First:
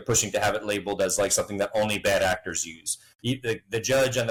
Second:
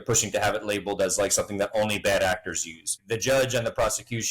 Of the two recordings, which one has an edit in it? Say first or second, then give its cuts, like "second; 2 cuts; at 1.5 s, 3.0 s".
second; 1 cut; at 3.0 s